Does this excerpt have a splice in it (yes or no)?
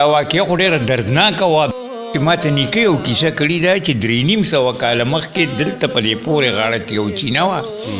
yes